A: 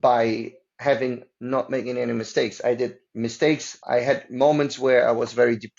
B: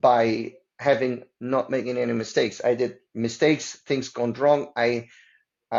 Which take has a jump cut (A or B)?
A